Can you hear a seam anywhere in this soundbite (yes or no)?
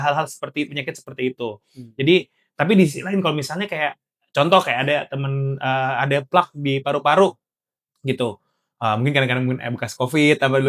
no